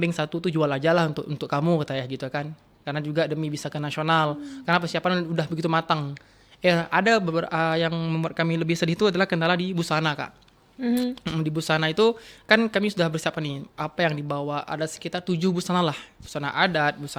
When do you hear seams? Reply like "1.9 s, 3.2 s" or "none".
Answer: none